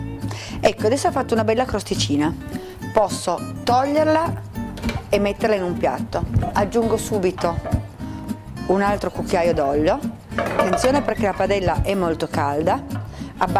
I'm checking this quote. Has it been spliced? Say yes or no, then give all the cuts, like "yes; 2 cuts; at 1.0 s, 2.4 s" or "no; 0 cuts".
no; 0 cuts